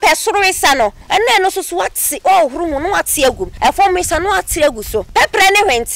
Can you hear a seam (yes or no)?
yes